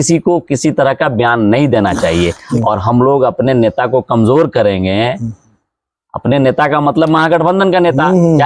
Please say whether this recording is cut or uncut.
cut